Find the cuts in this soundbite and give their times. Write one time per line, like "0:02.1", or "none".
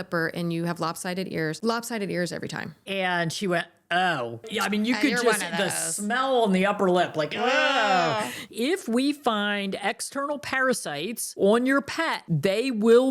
0:02.8
0:08.4
0:11.3